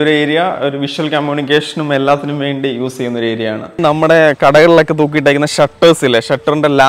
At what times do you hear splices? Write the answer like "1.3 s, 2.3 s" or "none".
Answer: 3.8 s